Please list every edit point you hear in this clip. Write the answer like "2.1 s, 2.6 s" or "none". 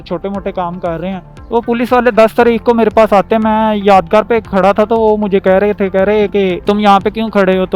1.3 s